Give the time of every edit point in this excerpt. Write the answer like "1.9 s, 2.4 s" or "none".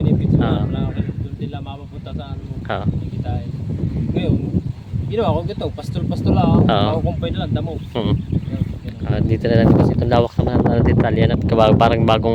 none